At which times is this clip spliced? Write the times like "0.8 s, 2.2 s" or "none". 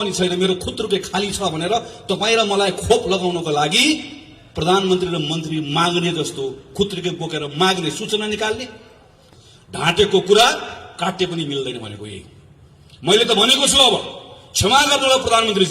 9.2 s